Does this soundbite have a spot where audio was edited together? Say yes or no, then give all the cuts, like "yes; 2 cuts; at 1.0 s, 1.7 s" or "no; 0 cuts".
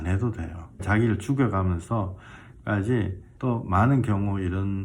yes; 2 cuts; at 0.8 s, 3.2 s